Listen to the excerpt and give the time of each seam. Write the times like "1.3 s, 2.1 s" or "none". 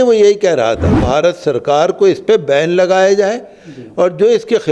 1.0 s